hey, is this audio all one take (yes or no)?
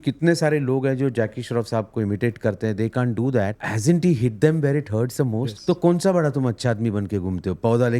no